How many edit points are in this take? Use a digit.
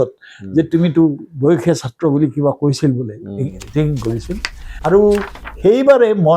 1